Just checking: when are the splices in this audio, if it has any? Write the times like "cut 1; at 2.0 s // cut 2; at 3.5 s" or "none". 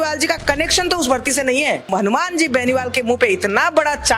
cut 1; at 1.9 s

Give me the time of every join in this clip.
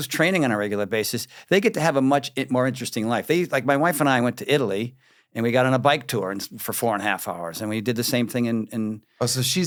none

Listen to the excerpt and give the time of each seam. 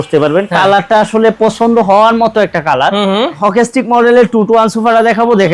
cut 1; at 3.4 s

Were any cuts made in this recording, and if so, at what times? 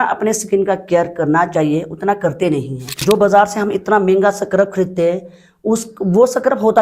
cut 1; at 3.0 s

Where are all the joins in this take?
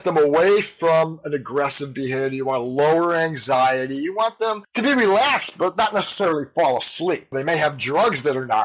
none

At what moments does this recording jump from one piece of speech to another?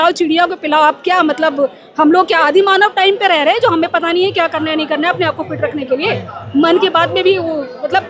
none

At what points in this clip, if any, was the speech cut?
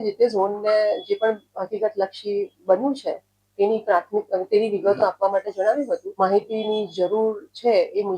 cut 1; at 6.1 s

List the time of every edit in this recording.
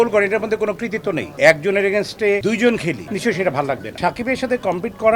cut 1; at 1.3 s // cut 2; at 3.8 s

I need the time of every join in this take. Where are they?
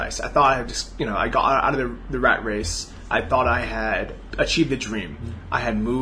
cut 1; at 4.2 s

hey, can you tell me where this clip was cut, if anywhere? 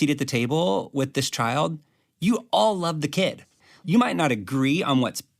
cut 1; at 3.6 s

